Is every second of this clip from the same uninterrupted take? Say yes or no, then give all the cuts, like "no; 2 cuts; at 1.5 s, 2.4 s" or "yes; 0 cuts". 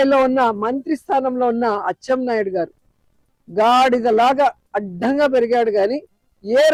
yes; 0 cuts